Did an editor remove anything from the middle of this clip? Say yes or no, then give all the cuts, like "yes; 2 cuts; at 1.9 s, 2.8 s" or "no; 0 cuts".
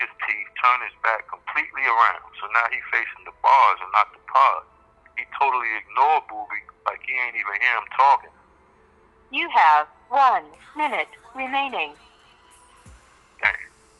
no; 0 cuts